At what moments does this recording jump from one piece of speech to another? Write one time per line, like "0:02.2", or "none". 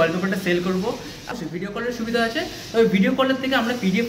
0:01.3